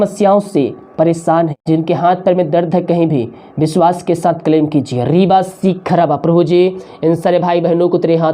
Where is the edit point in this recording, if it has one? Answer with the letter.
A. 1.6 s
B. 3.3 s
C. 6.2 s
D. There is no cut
A